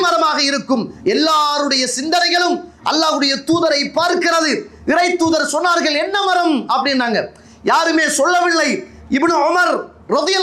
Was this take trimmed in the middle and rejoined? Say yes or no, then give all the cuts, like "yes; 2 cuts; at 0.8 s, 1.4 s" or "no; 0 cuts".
no; 0 cuts